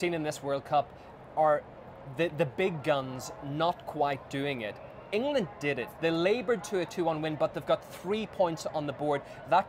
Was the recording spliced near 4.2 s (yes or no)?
yes